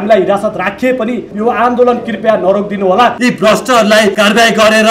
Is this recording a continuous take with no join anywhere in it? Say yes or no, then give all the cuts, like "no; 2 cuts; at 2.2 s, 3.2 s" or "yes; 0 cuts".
no; 3 cuts; at 1.3 s, 3.2 s, 4.1 s